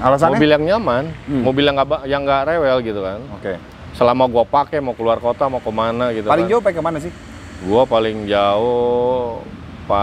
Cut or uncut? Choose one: uncut